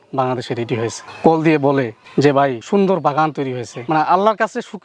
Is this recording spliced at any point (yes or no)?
yes